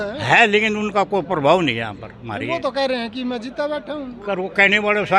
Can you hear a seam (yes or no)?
no